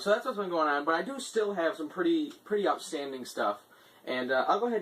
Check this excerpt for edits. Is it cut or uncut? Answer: cut